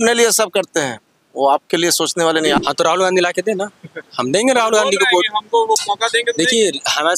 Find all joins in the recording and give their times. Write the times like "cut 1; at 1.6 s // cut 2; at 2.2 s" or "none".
cut 1; at 2.6 s